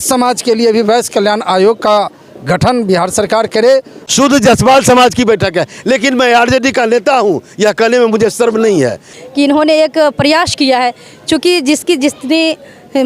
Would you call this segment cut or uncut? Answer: cut